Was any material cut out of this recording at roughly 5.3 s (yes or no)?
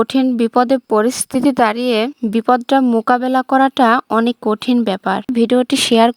yes